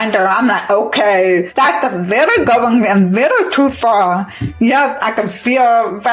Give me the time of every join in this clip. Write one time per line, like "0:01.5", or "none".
0:01.5